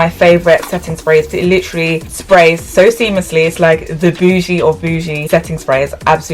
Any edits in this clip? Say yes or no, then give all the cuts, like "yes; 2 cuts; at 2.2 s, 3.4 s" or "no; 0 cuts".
yes; 1 cut; at 1.3 s